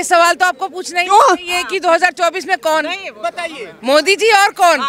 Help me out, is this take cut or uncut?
uncut